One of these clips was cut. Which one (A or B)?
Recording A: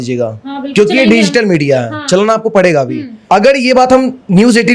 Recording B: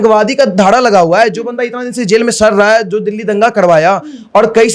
A